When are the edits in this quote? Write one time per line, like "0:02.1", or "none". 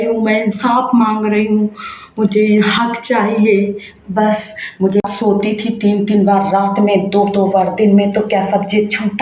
0:05.0